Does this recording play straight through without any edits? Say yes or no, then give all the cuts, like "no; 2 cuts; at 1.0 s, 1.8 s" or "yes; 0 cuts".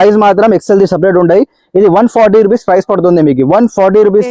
yes; 0 cuts